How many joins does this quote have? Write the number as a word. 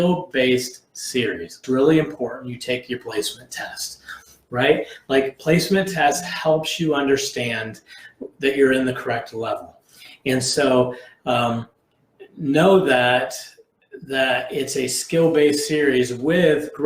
one